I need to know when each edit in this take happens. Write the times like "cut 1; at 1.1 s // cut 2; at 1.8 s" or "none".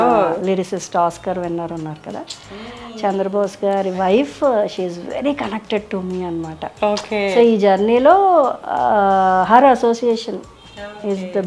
none